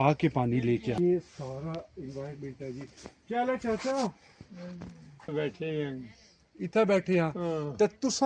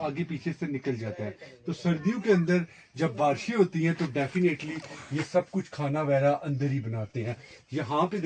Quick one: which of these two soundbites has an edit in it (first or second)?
first